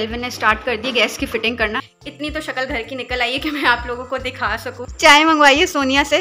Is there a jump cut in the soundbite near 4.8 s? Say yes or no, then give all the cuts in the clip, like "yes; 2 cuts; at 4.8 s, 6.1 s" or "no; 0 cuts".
yes; 2 cuts; at 1.9 s, 4.8 s